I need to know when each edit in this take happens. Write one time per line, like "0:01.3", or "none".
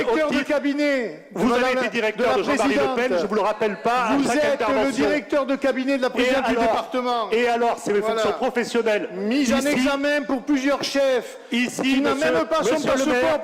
none